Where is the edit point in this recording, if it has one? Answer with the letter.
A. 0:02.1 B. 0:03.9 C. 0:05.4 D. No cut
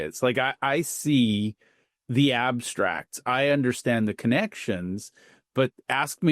D